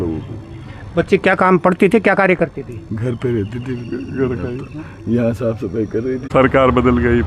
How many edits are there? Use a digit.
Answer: 1